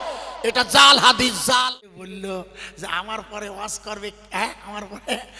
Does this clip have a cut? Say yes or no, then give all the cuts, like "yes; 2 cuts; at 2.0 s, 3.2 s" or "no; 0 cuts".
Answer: yes; 1 cut; at 1.9 s